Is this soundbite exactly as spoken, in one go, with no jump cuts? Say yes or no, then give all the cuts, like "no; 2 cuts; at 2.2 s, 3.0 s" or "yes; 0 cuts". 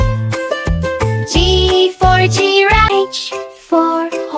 no; 1 cut; at 2.8 s